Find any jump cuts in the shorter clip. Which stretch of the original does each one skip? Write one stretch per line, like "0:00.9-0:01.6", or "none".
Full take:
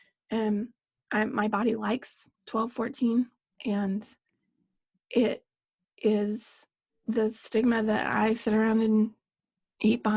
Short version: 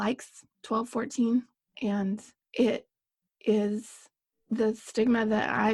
0:04.2-0:04.9